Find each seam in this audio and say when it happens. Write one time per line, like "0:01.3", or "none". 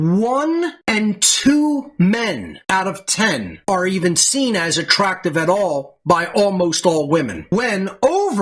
none